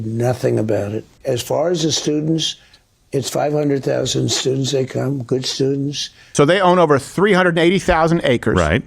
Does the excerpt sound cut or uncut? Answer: cut